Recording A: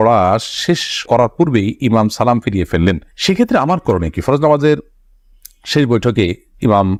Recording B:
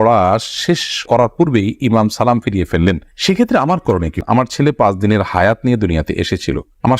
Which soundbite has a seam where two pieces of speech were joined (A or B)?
B